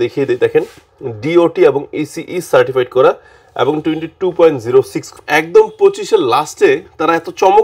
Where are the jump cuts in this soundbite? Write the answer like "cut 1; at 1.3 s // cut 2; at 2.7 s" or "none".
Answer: cut 1; at 5.1 s

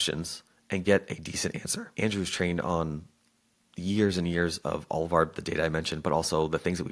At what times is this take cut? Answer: cut 1; at 1.9 s

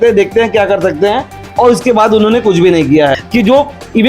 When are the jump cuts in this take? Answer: cut 1; at 3.1 s

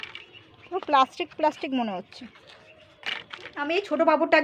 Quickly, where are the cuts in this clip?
cut 1; at 3.5 s

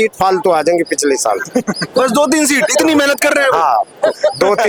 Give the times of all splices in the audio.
none

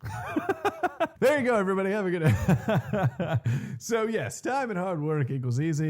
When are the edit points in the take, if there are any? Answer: cut 1; at 1.1 s

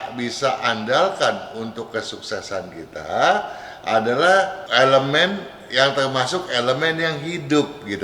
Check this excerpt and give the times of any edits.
cut 1; at 4.6 s

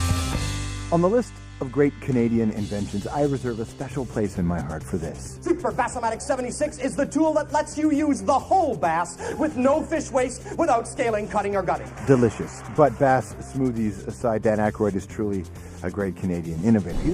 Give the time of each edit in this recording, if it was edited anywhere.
none

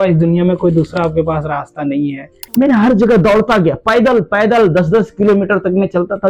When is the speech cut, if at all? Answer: cut 1; at 2.4 s

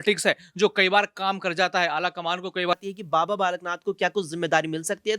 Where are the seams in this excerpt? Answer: cut 1; at 2.7 s

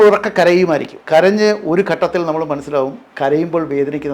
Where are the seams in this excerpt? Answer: cut 1; at 0.9 s

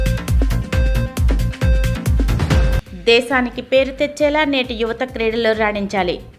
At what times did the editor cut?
cut 1; at 2.8 s

